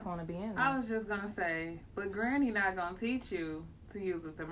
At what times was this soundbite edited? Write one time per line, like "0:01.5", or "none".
none